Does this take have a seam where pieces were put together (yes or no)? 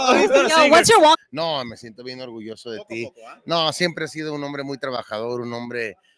yes